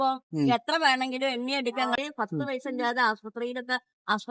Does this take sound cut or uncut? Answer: cut